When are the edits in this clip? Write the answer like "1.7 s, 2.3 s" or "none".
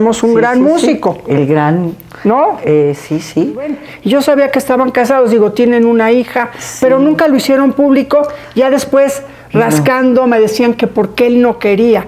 3.9 s